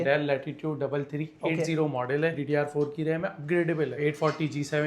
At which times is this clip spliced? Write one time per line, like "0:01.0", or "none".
0:02.4
0:04.0